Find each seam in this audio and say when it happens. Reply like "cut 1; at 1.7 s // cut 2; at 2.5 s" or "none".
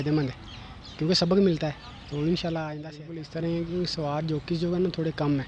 cut 1; at 3.1 s

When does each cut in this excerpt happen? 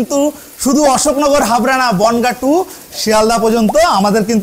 none

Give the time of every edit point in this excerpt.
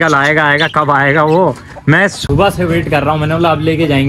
none

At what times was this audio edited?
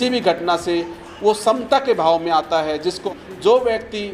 cut 1; at 3.0 s

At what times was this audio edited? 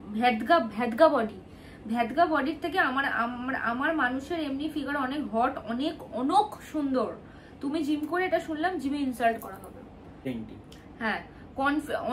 cut 1; at 10.3 s

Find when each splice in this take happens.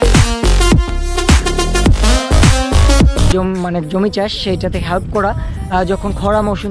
cut 1; at 3.3 s

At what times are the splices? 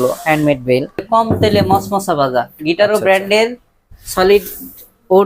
cut 1; at 1.0 s

